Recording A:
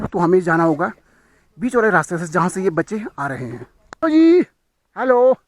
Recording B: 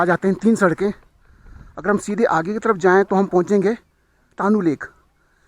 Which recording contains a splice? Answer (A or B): A